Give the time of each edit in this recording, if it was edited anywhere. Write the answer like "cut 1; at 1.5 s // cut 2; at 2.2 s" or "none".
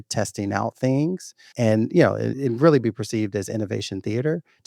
cut 1; at 2.3 s